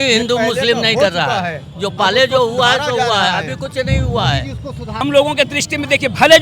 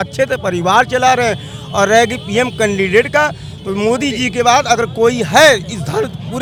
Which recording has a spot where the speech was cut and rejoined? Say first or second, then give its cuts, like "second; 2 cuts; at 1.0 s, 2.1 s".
first; 1 cut; at 4.9 s